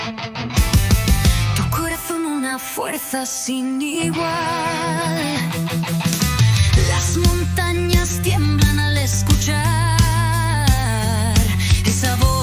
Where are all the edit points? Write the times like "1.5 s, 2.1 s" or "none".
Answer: none